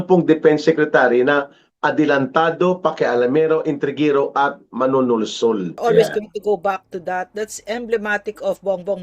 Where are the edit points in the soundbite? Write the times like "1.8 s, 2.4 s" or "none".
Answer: 5.8 s